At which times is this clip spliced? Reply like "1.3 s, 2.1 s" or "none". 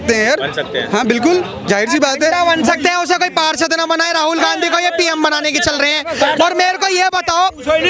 none